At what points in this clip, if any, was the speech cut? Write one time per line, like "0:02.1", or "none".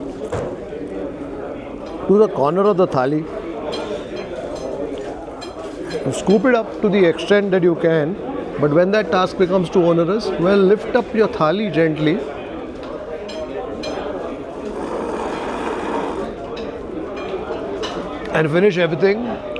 none